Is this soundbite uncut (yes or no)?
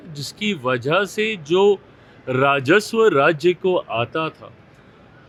yes